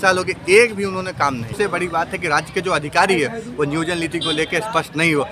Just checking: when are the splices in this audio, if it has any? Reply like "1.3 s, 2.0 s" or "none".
1.5 s